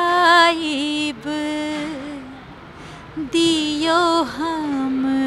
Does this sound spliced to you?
no; 0 cuts

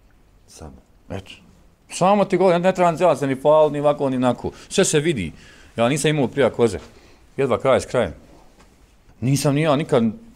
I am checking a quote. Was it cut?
yes; 1 cut; at 9.0 s

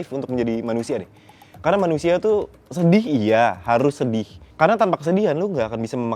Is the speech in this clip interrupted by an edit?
no; 0 cuts

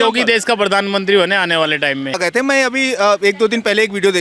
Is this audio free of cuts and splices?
no; 1 cut; at 2.2 s

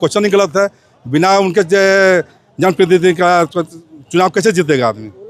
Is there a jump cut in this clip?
no; 0 cuts

